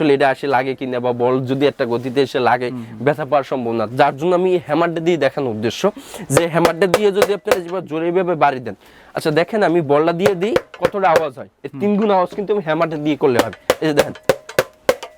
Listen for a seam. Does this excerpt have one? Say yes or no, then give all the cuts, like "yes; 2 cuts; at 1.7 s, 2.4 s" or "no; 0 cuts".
no; 0 cuts